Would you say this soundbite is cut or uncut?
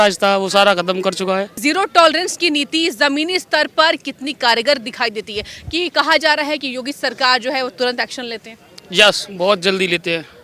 cut